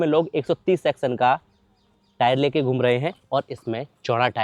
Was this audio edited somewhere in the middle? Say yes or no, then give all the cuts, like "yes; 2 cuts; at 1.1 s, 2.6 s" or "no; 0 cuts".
no; 0 cuts